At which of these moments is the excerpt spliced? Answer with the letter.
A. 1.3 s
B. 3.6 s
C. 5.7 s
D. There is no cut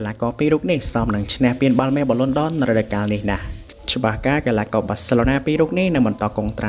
B